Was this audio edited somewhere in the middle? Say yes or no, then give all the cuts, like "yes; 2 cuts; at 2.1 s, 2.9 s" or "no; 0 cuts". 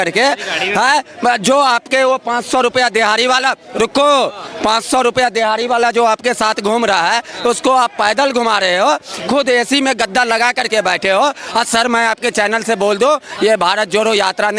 no; 0 cuts